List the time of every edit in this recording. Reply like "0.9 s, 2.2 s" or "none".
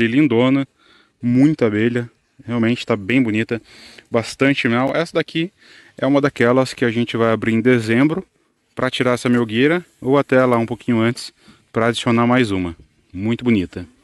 none